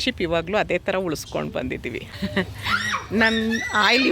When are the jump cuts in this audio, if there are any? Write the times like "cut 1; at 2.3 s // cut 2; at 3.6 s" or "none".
cut 1; at 2.0 s